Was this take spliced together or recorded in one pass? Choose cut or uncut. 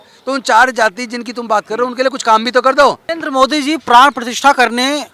cut